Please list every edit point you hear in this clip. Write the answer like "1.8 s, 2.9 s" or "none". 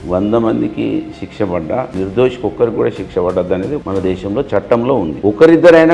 1.9 s, 3.8 s, 5.1 s